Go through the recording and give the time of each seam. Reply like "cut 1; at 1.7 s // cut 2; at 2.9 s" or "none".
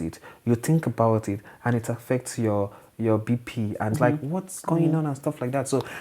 cut 1; at 3.9 s